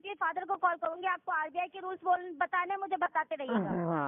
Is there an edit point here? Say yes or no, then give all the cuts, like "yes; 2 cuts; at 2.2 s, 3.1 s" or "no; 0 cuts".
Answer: no; 0 cuts